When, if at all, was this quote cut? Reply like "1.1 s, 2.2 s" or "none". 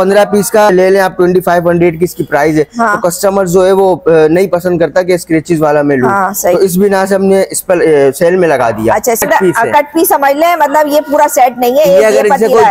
0.7 s, 9.2 s